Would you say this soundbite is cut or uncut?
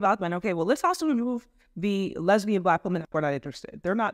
cut